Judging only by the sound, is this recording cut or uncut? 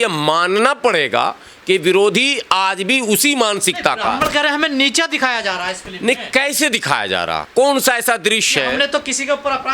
uncut